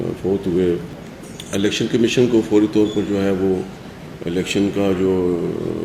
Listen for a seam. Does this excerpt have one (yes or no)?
yes